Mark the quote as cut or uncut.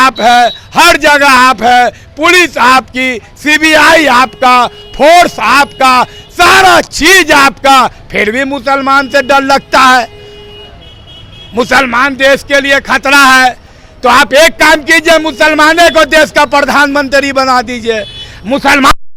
uncut